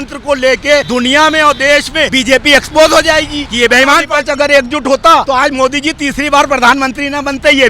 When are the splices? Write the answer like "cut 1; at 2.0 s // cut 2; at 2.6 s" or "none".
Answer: cut 1; at 0.9 s // cut 2; at 2.1 s // cut 3; at 3.4 s // cut 4; at 4.1 s // cut 5; at 5.2 s